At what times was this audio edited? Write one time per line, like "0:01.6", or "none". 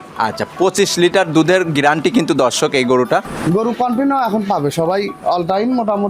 0:03.3